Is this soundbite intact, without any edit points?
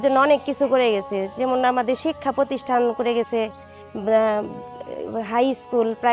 yes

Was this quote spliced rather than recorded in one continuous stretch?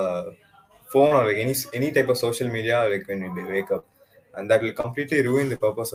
no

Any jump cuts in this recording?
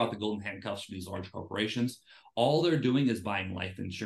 no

